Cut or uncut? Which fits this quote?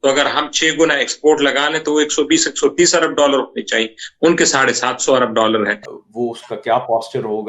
cut